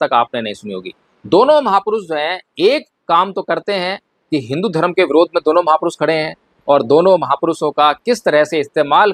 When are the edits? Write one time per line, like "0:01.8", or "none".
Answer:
none